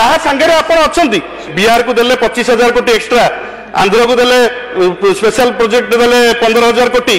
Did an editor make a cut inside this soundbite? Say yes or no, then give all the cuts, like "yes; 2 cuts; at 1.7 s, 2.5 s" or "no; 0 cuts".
yes; 1 cut; at 1.5 s